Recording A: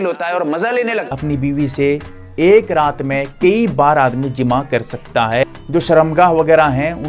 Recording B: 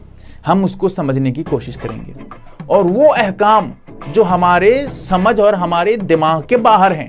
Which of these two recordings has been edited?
A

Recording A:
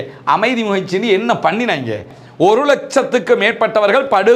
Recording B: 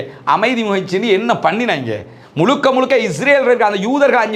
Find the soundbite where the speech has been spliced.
A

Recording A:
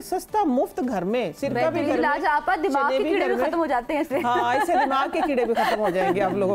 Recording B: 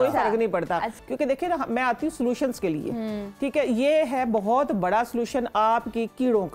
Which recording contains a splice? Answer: B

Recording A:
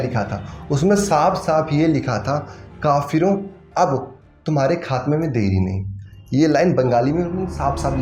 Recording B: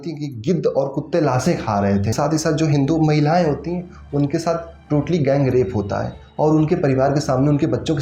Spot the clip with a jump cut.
B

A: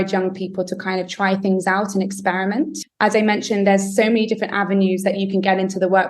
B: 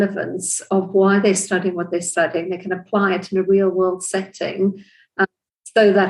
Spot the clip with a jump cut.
A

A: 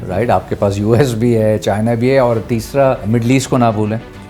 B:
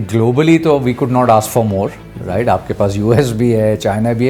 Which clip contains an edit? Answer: A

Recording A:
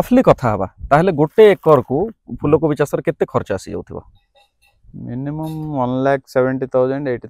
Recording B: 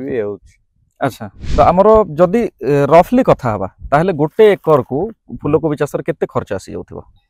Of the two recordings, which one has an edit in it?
B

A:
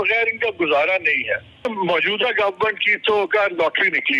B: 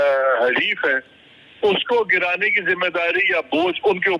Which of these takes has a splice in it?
A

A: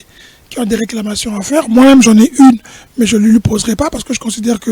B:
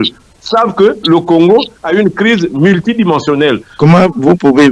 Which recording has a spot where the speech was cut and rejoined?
B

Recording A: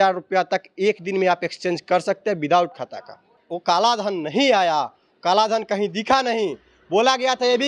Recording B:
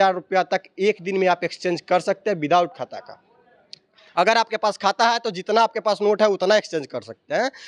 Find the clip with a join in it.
A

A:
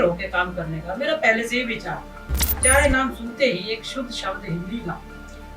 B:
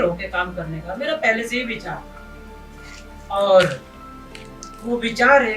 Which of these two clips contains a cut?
A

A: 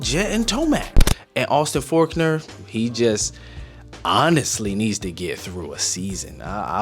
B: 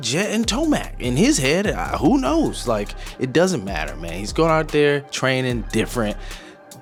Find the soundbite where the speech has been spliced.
A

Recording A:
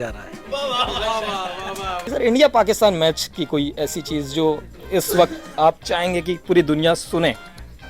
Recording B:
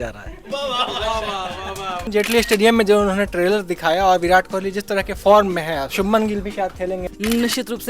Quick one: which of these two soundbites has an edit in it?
B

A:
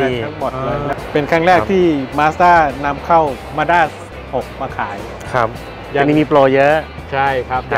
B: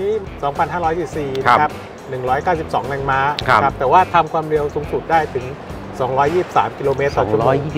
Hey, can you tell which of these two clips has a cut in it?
A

